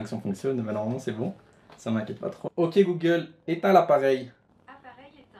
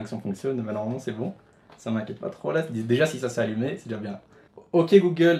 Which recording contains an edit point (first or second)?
first